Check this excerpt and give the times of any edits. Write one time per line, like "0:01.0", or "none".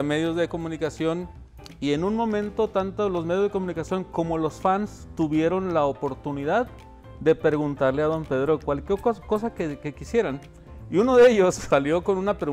0:11.6